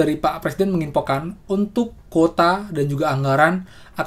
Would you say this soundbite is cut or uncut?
uncut